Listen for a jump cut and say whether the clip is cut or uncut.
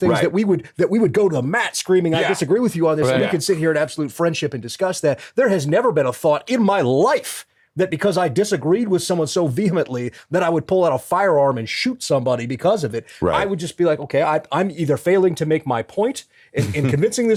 uncut